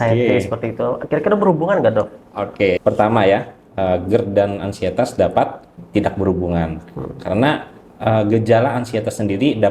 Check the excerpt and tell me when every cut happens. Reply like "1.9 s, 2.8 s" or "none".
2.8 s, 5.7 s